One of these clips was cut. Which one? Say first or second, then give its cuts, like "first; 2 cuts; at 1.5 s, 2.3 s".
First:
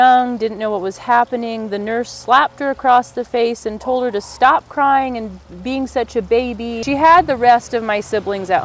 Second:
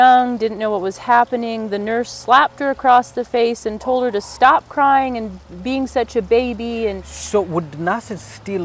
first; 1 cut; at 6.8 s